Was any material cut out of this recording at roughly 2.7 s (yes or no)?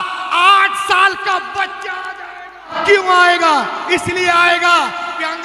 yes